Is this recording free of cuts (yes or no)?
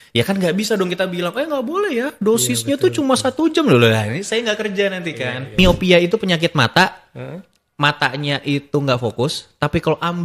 no